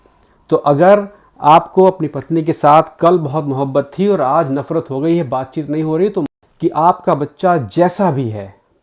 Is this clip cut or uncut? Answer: cut